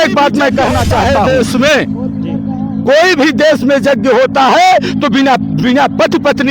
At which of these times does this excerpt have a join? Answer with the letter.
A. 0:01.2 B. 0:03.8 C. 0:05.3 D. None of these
A